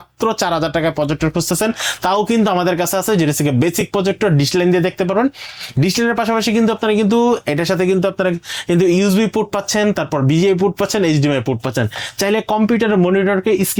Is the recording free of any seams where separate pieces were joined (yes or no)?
yes